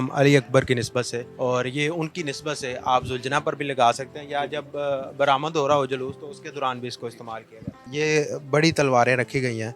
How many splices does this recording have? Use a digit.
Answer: 2